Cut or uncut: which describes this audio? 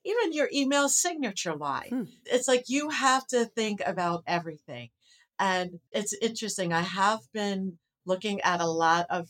uncut